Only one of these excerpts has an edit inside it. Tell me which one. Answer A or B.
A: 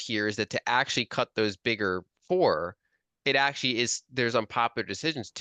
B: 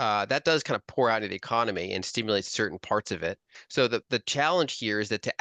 B